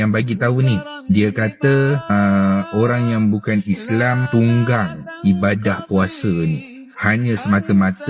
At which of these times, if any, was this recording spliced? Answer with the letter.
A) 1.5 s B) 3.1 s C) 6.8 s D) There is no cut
D